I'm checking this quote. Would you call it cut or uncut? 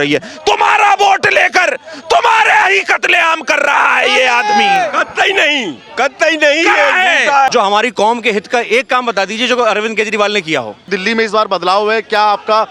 cut